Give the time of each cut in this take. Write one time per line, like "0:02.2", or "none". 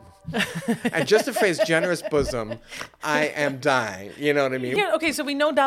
0:04.7